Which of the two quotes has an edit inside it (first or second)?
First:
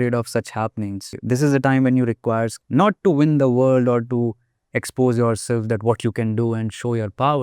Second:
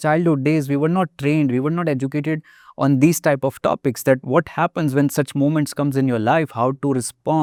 first